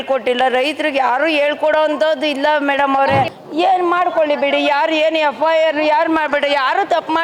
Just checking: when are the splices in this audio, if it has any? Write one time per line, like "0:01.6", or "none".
0:03.4

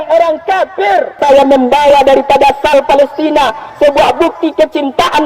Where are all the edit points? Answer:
0:01.2

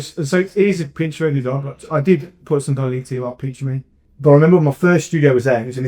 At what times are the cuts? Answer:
0:04.0

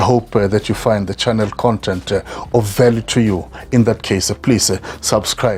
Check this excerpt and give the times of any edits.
none

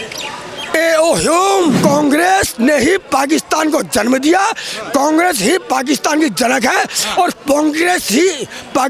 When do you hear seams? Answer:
0:01.8

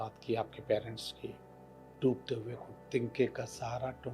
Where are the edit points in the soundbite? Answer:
0:01.9

